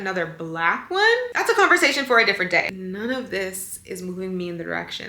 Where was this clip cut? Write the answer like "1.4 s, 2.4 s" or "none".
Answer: 2.7 s